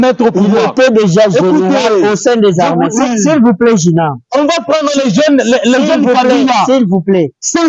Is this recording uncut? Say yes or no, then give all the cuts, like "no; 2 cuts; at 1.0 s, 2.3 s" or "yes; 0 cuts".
yes; 0 cuts